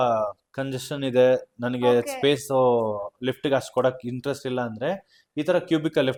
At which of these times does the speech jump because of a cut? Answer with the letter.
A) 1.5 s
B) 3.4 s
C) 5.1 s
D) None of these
D